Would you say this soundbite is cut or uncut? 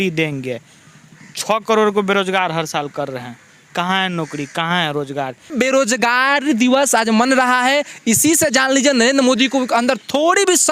cut